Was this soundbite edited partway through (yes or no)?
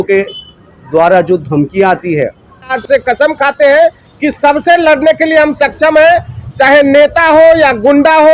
yes